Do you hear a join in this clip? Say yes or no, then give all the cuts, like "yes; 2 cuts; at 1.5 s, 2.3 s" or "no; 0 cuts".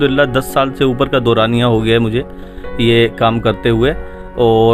no; 0 cuts